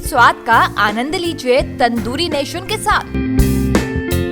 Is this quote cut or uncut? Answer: uncut